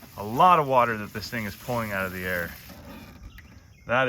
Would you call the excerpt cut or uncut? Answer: cut